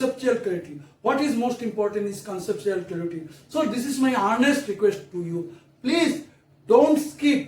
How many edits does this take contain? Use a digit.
0